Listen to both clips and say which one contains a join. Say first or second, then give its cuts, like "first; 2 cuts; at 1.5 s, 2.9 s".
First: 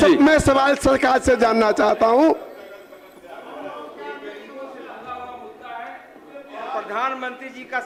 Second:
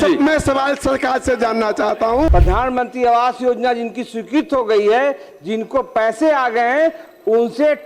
second; 1 cut; at 2.3 s